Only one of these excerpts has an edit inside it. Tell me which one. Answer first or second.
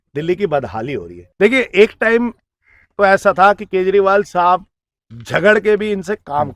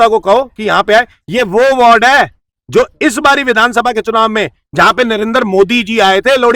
first